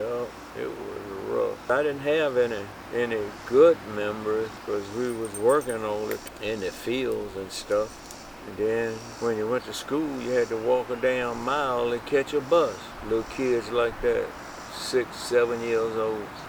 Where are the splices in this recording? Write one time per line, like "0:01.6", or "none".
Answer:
0:09.1